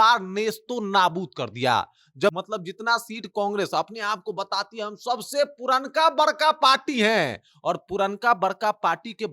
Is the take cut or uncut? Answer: cut